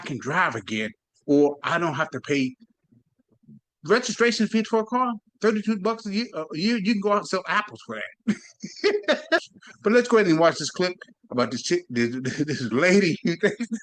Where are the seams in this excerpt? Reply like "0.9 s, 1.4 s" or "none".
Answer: 3.1 s, 9.5 s